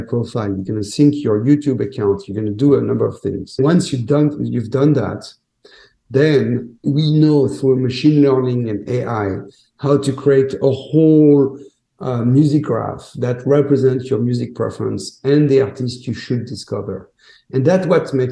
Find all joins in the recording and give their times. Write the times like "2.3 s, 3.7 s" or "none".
3.6 s, 6.8 s